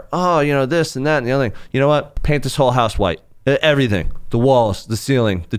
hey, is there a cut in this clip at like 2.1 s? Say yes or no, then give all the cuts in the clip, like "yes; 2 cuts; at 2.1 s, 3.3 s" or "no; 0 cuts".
yes; 1 cut; at 2.1 s